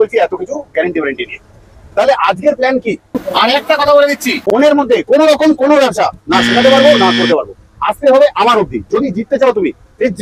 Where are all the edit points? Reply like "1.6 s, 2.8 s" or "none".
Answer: 3.2 s